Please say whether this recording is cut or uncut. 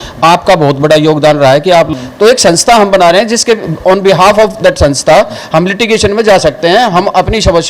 cut